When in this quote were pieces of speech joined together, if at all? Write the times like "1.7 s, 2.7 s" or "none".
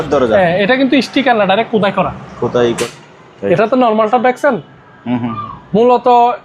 2.9 s